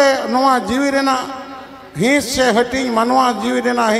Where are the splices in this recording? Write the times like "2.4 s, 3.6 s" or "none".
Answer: none

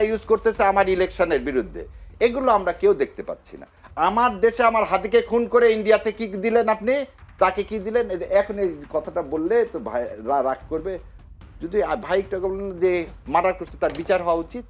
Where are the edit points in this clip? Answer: none

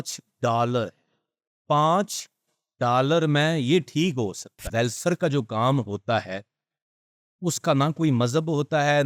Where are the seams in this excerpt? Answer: 4.7 s

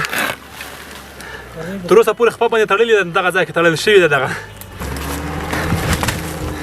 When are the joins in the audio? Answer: 4.7 s

